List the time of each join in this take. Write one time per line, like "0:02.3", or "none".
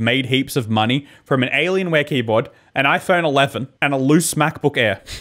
none